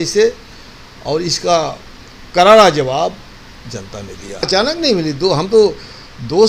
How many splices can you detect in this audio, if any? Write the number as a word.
one